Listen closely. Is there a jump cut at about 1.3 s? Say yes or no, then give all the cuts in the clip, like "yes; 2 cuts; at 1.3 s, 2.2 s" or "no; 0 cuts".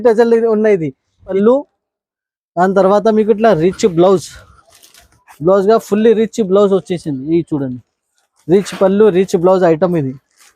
yes; 1 cut; at 1.3 s